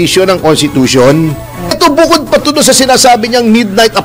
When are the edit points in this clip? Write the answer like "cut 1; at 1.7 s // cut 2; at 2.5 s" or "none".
cut 1; at 1.8 s